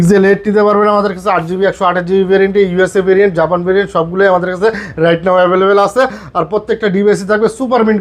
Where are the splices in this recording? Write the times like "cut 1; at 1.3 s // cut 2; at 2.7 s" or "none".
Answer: none